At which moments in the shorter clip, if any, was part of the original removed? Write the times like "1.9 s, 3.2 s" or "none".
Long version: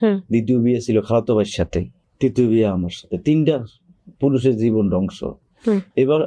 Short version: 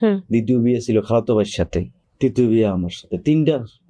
none